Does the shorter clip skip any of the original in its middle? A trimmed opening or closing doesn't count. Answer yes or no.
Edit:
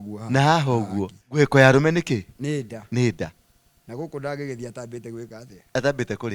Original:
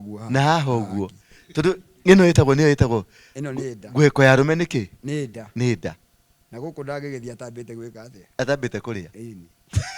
yes